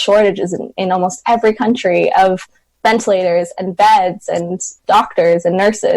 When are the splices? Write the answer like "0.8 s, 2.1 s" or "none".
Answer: 4.8 s

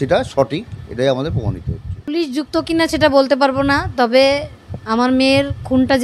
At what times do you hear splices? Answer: 2.1 s

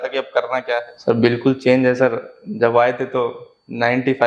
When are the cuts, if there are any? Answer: 0.9 s

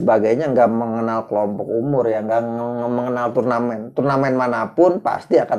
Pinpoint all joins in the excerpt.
none

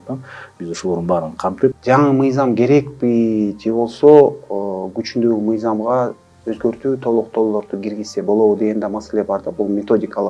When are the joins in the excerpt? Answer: 1.8 s

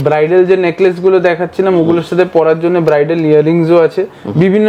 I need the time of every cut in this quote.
none

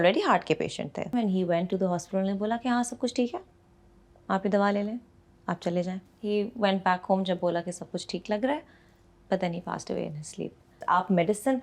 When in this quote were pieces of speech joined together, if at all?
1.1 s, 6.1 s, 10.8 s

